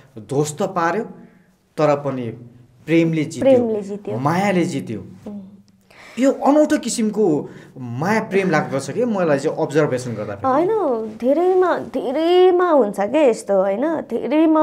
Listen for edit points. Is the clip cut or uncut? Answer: uncut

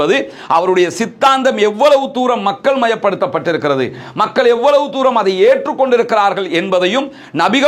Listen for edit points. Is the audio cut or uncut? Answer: uncut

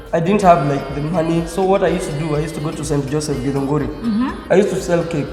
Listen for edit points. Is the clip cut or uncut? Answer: uncut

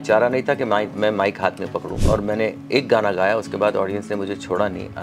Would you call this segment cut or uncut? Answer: cut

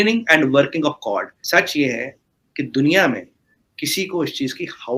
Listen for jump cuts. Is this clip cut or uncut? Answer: uncut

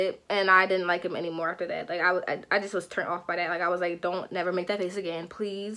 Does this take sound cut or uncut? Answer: uncut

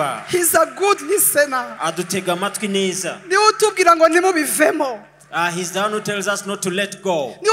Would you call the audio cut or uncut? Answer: uncut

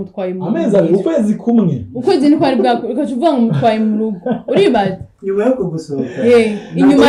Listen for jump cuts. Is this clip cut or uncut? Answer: uncut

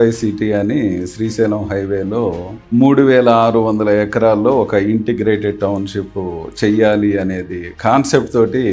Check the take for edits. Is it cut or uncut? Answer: uncut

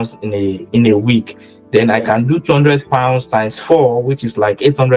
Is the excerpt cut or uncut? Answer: uncut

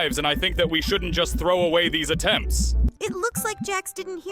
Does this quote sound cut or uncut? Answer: uncut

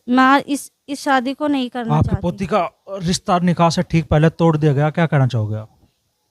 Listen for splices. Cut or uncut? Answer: cut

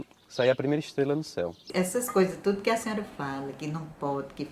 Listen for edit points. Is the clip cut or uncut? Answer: cut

